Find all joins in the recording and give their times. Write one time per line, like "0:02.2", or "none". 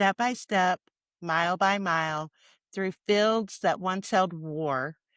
none